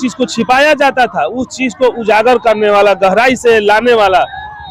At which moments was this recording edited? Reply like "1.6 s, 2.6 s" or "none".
none